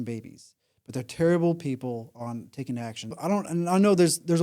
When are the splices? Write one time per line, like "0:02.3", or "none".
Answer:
0:03.2